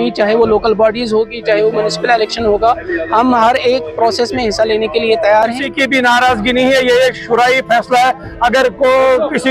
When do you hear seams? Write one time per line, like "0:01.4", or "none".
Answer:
0:05.6